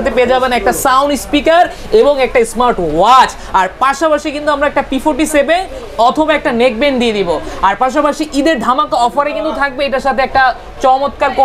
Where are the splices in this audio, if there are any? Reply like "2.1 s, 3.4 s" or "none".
none

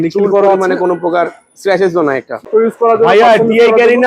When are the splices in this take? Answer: 2.5 s

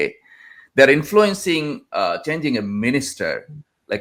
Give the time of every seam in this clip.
none

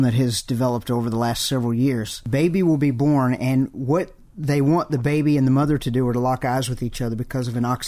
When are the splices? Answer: 2.2 s

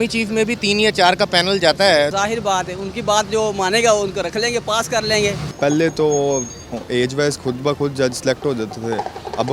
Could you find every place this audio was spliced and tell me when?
2.1 s, 5.5 s

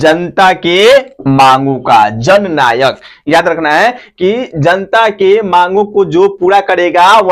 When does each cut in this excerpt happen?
none

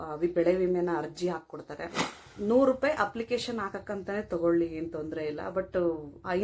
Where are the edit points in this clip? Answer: 2.3 s

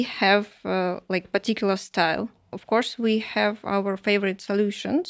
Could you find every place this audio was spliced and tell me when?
2.5 s

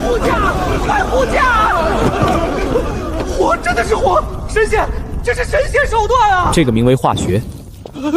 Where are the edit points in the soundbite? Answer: 6.5 s

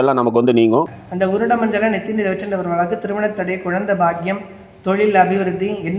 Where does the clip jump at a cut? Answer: 1.0 s

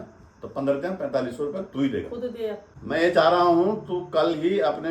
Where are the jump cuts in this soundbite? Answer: 2.7 s

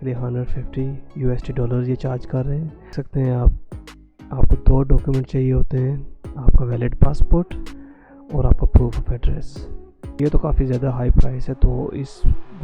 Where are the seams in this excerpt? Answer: 2.9 s, 10.1 s

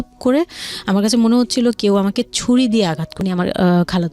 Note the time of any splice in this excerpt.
3.1 s

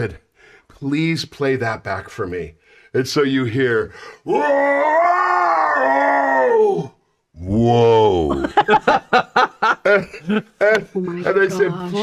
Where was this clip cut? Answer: none

